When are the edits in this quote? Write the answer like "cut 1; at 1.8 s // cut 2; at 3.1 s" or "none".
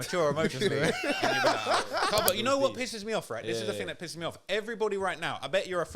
cut 1; at 2.3 s